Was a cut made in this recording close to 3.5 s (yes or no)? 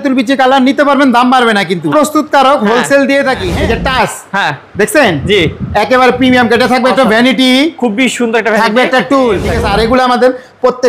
yes